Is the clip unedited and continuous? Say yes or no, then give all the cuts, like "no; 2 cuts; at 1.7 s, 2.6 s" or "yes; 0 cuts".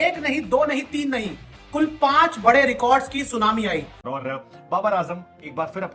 no; 1 cut; at 4.0 s